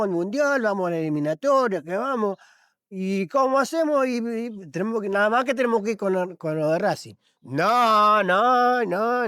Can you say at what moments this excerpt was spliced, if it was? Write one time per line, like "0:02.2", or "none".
none